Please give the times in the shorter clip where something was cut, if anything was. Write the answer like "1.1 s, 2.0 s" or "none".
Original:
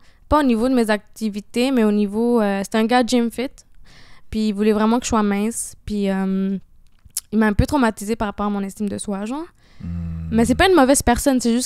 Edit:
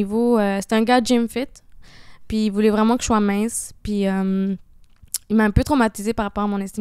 none